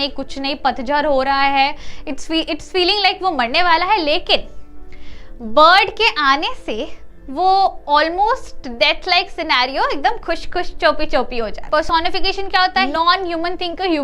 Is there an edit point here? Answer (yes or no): yes